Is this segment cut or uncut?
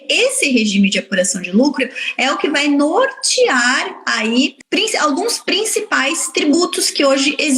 cut